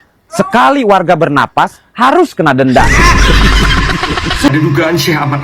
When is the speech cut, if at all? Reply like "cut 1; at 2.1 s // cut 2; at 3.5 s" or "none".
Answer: cut 1; at 4.5 s